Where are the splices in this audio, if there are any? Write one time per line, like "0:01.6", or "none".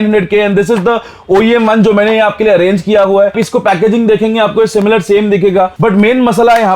0:03.4
0:05.7